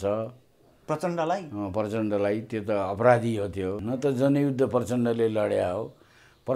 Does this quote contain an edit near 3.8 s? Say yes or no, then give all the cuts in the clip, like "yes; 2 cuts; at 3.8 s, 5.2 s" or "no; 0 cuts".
yes; 1 cut; at 3.8 s